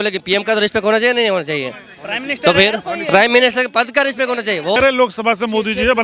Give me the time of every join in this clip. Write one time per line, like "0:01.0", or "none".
0:04.8